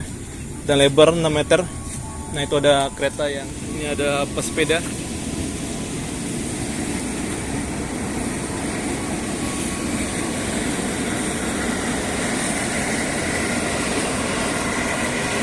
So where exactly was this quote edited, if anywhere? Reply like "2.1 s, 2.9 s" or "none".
3.5 s